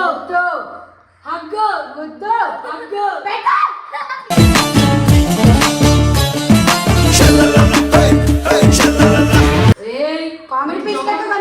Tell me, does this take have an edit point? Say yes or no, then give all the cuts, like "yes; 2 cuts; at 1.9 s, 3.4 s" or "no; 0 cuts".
yes; 1 cut; at 9.8 s